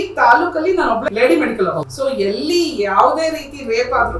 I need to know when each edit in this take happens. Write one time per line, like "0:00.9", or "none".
0:01.1
0:01.9